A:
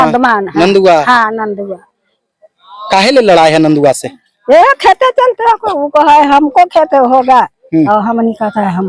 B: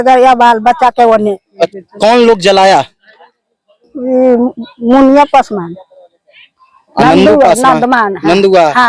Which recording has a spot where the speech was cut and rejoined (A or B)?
B